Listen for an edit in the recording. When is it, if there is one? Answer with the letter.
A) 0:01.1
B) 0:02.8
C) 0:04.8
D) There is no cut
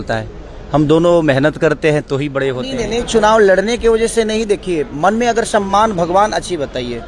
B